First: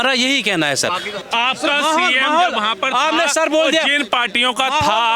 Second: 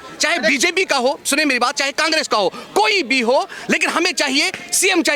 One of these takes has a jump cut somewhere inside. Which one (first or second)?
first